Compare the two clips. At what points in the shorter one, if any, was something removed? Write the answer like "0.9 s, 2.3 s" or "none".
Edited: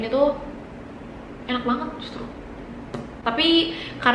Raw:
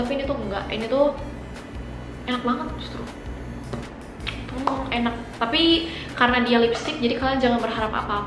3.1 s